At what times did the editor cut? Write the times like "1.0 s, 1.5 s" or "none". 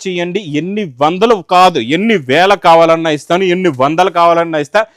none